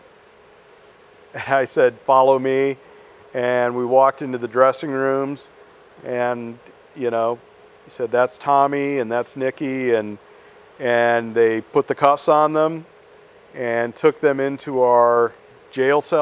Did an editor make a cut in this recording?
no; 0 cuts

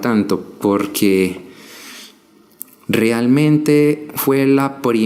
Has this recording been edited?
no; 0 cuts

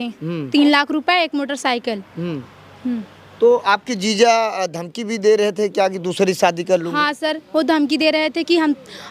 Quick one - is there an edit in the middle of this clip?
no; 0 cuts

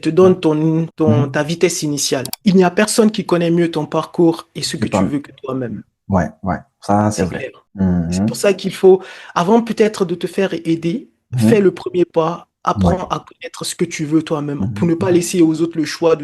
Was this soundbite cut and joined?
yes; 1 cut; at 2.3 s

